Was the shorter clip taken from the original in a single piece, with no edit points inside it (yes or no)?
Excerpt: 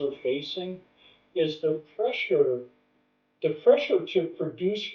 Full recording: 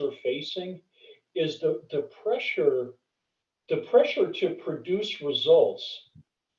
no